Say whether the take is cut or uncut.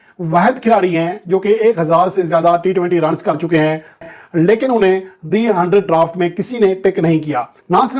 cut